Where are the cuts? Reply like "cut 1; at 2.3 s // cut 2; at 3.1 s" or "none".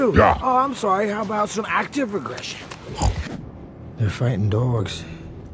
cut 1; at 3.6 s